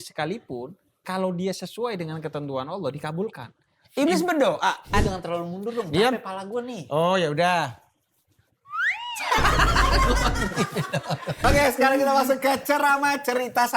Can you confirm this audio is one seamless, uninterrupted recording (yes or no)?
no